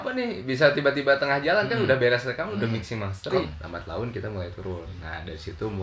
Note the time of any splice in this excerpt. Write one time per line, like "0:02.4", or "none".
0:03.6

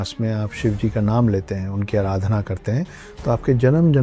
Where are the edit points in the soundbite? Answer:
none

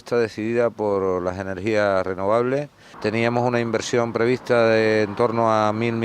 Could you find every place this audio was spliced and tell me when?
0:04.4

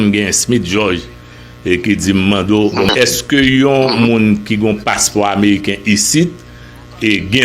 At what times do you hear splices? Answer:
0:02.9

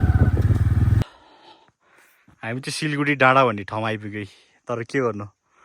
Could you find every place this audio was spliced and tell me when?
0:01.0

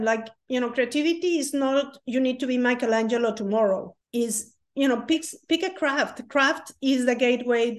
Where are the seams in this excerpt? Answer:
0:04.0

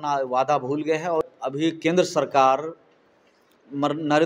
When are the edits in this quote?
0:01.3

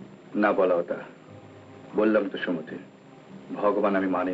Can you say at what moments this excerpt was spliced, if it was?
none

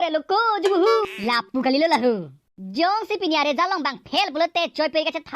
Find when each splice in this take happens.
0:01.1

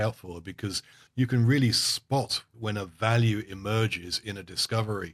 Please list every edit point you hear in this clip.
0:01.0
0:02.5

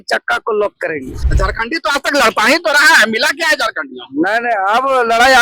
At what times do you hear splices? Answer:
0:01.2

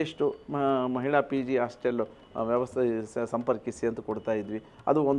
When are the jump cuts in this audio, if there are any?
none

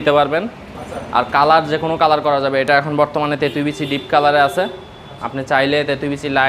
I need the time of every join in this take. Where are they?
none

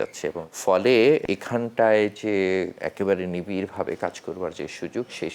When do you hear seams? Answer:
0:01.2
0:02.8

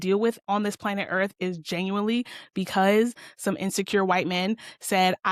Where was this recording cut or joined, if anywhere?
none

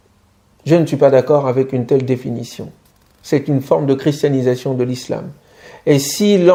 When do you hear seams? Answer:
none

